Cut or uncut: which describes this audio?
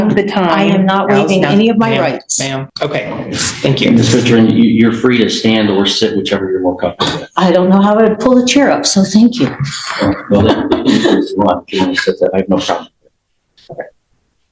uncut